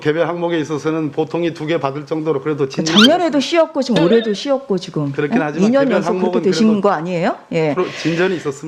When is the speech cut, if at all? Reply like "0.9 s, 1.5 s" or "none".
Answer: none